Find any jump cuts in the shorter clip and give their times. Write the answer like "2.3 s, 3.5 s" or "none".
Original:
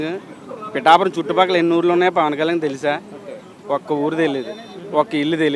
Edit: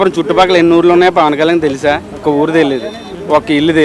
2.2 s

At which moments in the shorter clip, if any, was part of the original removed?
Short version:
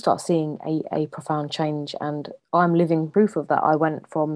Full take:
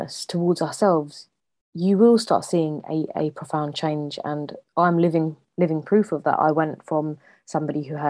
3.1 s

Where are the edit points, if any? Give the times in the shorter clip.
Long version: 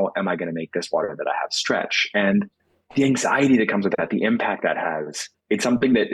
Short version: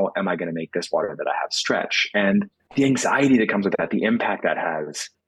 2.6 s

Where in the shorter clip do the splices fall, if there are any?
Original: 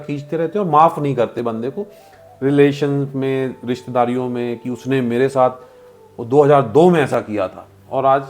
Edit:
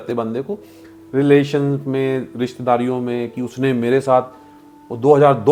none

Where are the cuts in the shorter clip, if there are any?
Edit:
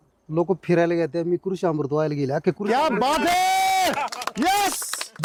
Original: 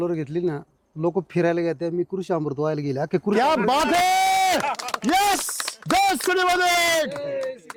none

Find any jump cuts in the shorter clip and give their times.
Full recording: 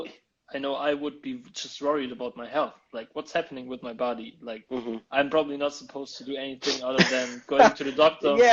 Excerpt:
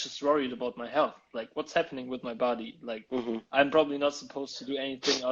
none

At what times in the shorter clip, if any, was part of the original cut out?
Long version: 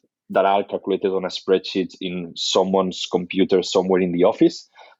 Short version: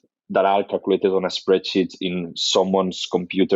none

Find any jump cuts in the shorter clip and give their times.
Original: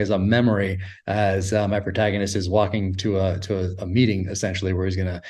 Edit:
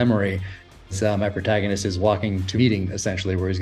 0.8 s, 2.5 s

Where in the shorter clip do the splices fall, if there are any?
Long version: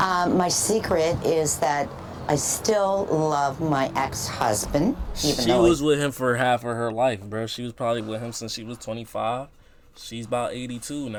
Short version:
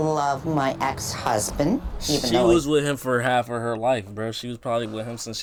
none

